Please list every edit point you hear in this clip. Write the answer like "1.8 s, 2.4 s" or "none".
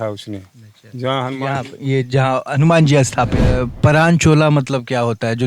3.5 s